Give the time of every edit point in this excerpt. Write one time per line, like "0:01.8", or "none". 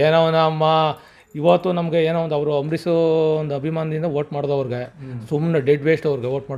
none